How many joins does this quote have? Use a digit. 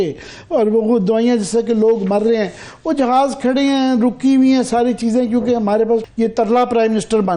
1